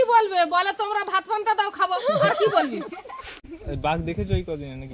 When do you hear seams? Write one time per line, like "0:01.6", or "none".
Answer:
none

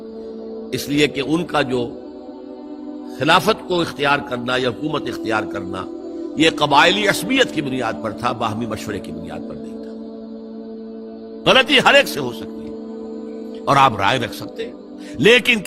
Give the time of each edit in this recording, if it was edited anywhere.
0:09.1
0:11.3

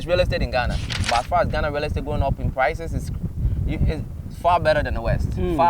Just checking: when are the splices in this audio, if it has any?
0:00.9

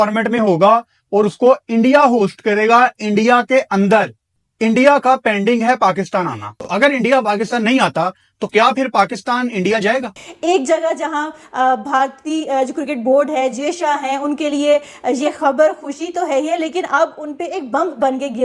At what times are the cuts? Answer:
0:06.6
0:10.2

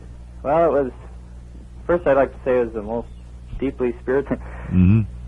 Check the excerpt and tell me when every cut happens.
none

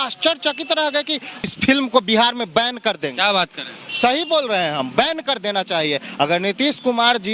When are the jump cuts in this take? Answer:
0:01.5

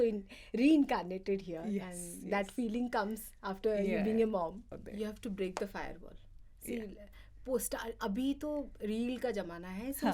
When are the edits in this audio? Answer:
0:04.7

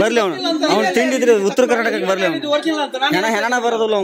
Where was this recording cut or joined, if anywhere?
none

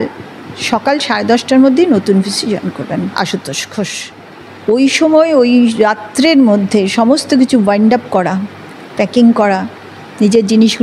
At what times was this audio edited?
0:04.1

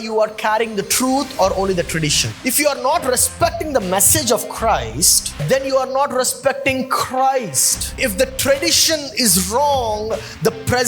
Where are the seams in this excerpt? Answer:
0:02.4
0:05.4
0:07.9

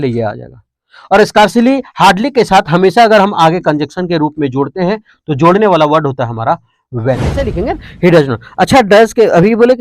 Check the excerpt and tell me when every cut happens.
0:07.3

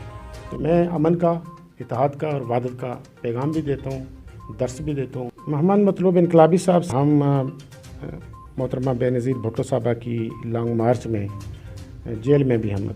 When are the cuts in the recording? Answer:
0:05.4
0:06.9

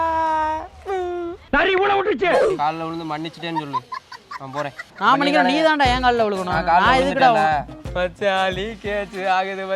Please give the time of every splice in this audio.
0:02.6
0:07.8

